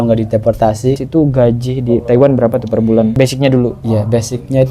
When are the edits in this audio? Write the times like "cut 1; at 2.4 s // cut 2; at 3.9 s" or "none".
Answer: cut 1; at 1.0 s

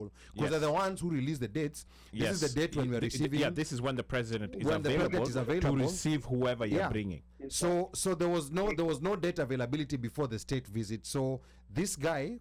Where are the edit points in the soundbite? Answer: none

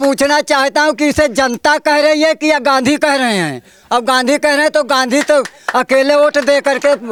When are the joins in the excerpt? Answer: none

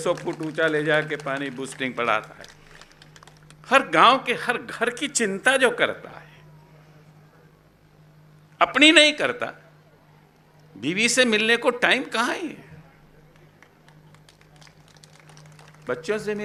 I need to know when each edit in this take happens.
none

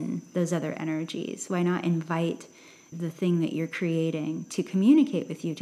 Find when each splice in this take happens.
cut 1; at 2.9 s

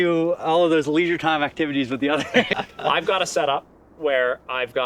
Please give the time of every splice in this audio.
none

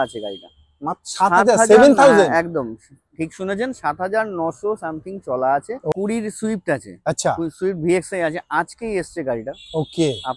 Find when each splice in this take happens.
cut 1; at 5.9 s

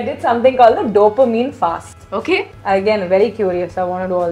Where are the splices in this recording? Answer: cut 1; at 2.5 s

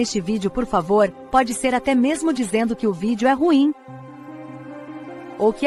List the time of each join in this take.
none

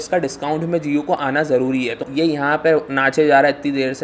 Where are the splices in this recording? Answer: cut 1; at 2.1 s

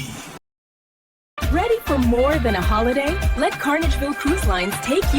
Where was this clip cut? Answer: cut 1; at 1.1 s

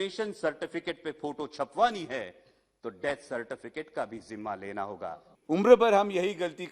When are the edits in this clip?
cut 1; at 5.3 s

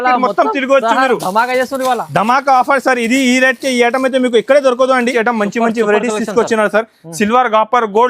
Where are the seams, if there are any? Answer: cut 1; at 5.0 s

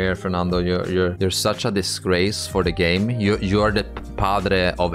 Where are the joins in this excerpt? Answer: cut 1; at 1.1 s

